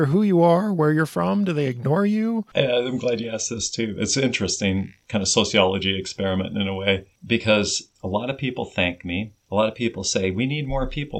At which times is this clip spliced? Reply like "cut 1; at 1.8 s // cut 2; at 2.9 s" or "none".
cut 1; at 2.5 s // cut 2; at 5.0 s // cut 3; at 7.1 s // cut 4; at 7.8 s // cut 5; at 9.4 s